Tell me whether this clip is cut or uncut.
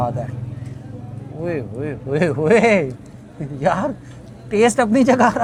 uncut